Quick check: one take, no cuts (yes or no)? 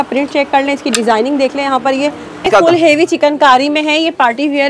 no